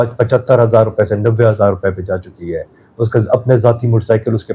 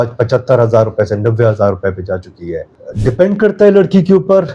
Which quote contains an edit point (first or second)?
second